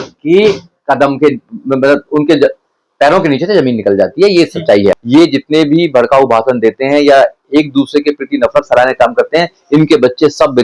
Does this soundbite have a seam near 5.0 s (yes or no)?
yes